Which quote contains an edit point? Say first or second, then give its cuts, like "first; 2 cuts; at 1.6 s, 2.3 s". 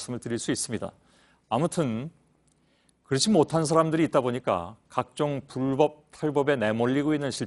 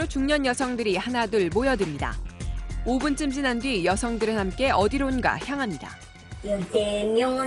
second; 1 cut; at 1.0 s